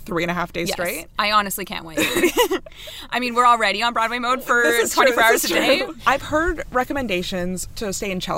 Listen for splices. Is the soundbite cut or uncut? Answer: uncut